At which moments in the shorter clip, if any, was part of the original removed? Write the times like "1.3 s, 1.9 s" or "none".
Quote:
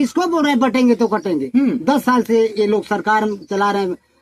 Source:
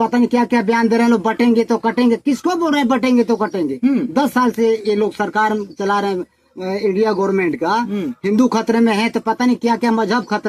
none